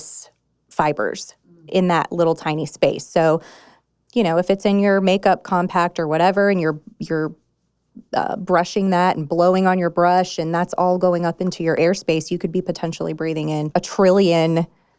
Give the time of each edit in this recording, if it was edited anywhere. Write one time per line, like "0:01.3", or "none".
0:11.8
0:13.7